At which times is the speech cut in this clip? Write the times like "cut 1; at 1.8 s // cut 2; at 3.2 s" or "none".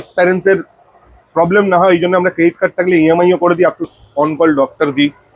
cut 1; at 3.9 s